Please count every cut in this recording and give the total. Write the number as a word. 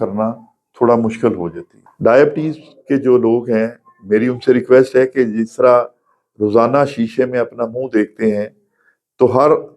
one